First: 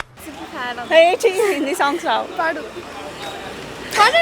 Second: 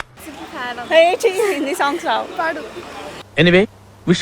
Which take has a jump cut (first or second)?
second